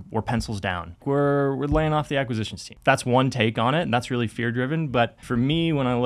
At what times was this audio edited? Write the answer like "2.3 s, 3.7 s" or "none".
1.0 s, 2.6 s, 5.2 s